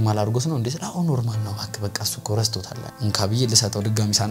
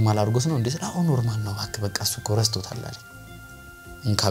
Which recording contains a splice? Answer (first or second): first